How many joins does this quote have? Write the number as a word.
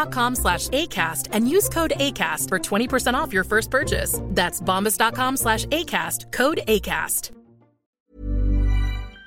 one